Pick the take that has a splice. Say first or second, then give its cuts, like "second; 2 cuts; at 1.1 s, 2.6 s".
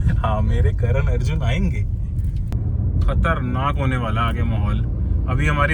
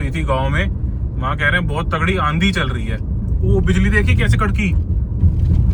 first; 1 cut; at 2.5 s